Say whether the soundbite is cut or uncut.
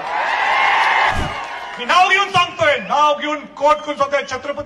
cut